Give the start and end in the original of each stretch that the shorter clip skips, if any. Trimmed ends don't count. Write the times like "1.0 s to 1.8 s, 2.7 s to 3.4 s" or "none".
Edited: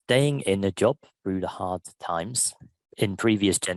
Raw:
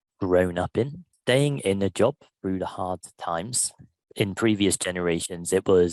none